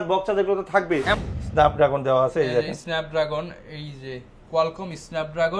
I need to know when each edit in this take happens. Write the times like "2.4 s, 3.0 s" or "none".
1.2 s